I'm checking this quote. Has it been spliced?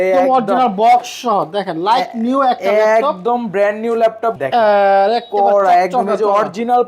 yes; 1 cut; at 4.4 s

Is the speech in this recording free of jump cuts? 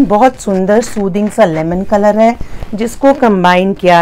yes; 0 cuts

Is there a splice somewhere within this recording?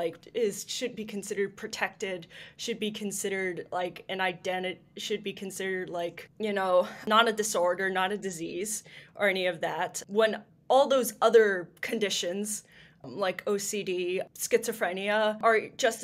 no; 0 cuts

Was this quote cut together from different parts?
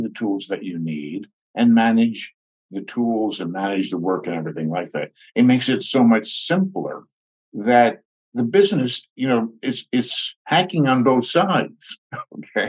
no; 0 cuts

